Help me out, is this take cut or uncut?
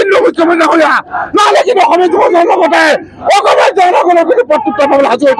uncut